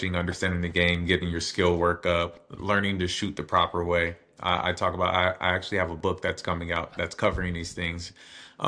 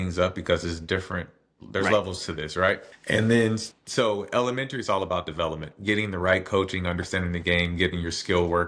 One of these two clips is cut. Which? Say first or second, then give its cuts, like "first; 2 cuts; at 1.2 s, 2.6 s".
second; 2 cuts; at 2.9 s, 3.7 s